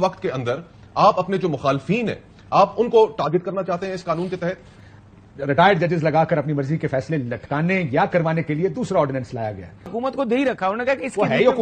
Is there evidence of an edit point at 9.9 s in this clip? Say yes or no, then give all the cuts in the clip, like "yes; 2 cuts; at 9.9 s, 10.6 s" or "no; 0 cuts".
yes; 2 cuts; at 4.7 s, 9.9 s